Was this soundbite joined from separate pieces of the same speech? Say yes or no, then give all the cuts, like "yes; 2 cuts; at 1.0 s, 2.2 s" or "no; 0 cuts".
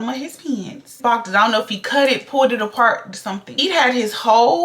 yes; 1 cut; at 3.6 s